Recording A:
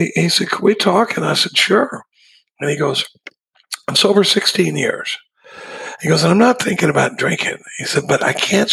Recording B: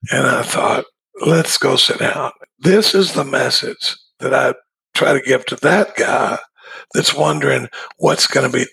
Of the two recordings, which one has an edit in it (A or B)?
B